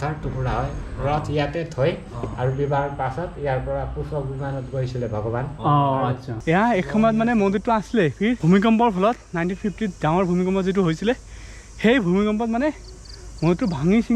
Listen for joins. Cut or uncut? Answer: cut